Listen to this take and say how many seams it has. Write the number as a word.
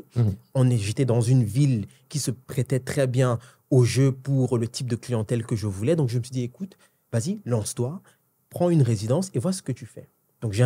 one